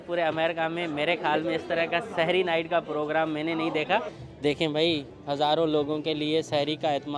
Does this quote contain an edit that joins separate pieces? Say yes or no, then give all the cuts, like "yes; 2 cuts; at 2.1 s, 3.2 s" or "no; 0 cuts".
yes; 1 cut; at 4.2 s